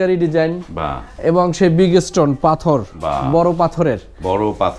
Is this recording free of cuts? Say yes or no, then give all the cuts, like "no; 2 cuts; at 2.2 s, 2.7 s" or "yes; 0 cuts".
yes; 0 cuts